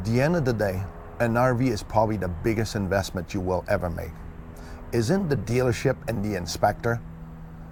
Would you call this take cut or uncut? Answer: uncut